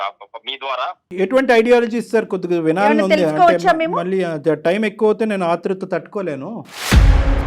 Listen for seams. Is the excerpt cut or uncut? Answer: cut